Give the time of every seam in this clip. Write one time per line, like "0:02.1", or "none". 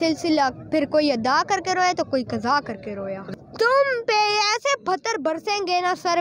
0:03.2